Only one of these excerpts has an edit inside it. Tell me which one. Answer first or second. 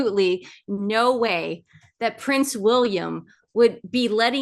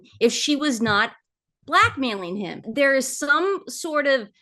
second